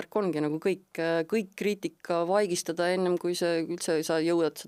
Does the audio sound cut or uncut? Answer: uncut